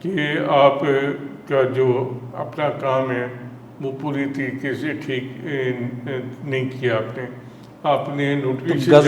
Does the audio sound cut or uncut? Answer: uncut